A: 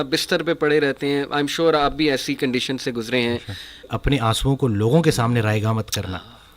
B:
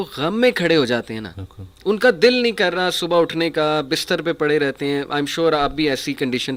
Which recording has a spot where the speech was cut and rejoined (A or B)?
A